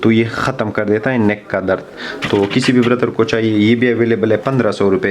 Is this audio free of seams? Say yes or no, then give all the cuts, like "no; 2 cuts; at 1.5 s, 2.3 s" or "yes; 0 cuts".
yes; 0 cuts